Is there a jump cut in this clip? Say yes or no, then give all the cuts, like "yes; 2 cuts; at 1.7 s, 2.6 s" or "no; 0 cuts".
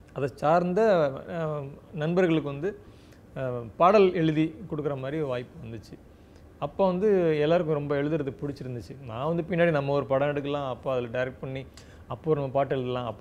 no; 0 cuts